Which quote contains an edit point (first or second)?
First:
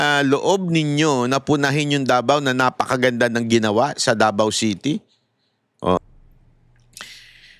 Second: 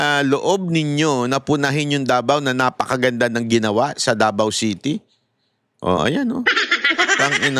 first